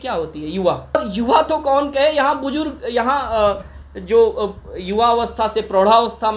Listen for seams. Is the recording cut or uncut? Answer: cut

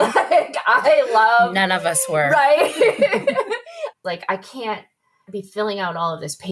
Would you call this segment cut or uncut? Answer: cut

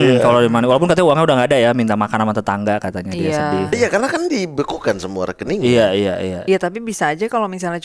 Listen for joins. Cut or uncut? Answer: cut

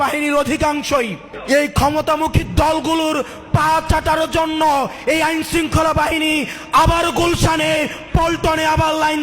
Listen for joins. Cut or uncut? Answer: cut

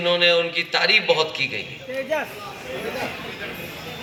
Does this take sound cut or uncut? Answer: uncut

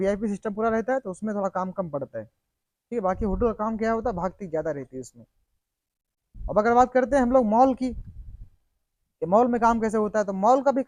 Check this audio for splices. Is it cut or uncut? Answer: uncut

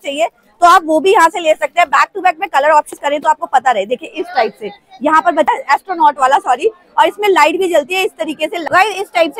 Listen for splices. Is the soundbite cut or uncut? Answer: cut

